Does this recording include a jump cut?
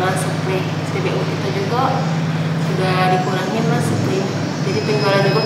no; 0 cuts

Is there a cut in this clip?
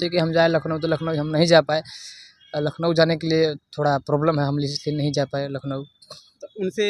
no; 0 cuts

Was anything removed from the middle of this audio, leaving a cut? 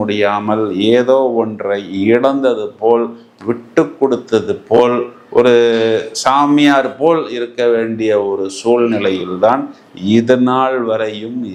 no; 0 cuts

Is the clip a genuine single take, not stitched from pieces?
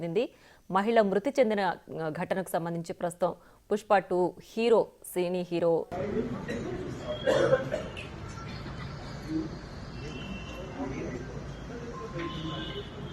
no; 1 cut; at 5.9 s

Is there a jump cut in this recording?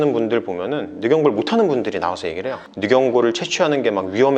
yes; 1 cut; at 2.6 s

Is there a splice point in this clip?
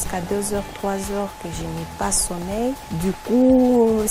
no; 0 cuts

